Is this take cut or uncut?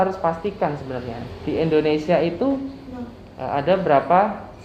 uncut